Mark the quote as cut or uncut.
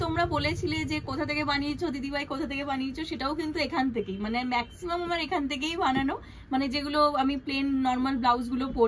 uncut